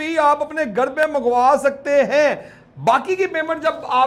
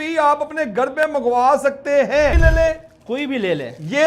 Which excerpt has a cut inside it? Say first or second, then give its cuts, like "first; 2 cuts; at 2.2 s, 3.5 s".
second; 1 cut; at 2.4 s